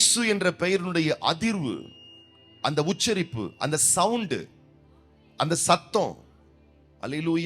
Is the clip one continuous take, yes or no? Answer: yes